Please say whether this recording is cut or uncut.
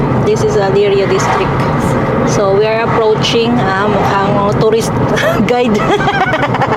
uncut